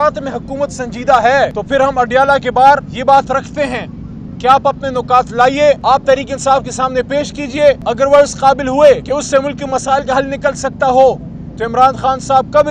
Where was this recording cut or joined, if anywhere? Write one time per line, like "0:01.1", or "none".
0:01.6
0:02.9
0:05.8
0:07.8
0:09.0